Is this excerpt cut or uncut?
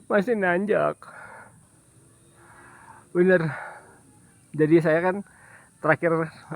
cut